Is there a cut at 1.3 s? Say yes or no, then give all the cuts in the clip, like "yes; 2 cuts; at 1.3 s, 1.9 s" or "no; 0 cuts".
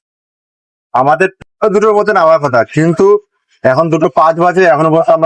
yes; 1 cut; at 1.3 s